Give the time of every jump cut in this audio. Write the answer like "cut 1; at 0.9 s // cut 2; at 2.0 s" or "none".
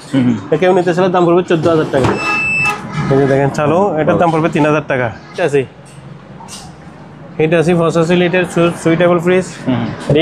cut 1; at 2.3 s // cut 2; at 5.4 s